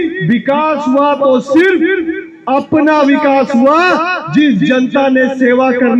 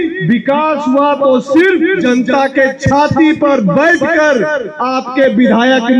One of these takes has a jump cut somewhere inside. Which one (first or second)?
second